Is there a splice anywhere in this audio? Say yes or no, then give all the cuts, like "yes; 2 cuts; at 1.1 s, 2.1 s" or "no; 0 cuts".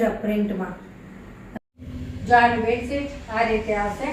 yes; 1 cut; at 1.6 s